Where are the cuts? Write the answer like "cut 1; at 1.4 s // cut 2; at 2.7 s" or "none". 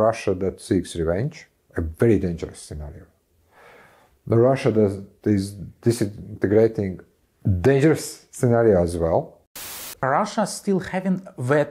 cut 1; at 9.8 s